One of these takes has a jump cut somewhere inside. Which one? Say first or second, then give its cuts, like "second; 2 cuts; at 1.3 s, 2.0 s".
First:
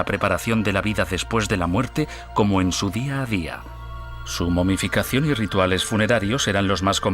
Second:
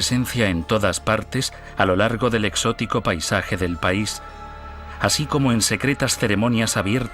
first; 1 cut; at 1.4 s